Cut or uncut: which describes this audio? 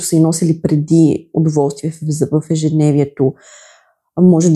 uncut